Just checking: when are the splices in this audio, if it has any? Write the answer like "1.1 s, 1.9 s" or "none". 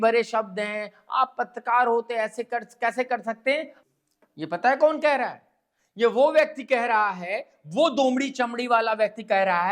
3.7 s